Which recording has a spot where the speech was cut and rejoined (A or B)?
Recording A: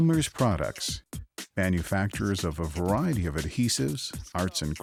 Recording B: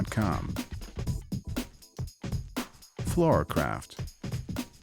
B